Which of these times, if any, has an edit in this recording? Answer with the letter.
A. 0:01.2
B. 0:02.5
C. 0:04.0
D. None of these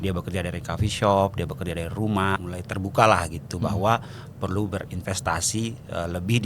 B